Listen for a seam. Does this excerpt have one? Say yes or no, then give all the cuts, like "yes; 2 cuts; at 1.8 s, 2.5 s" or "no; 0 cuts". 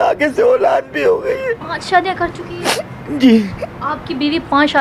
no; 0 cuts